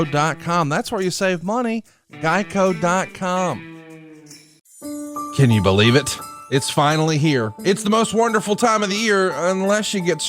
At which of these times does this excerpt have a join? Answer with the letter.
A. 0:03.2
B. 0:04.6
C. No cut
B